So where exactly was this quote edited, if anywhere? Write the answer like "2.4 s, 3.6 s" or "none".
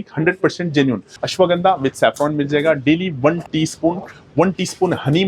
1.0 s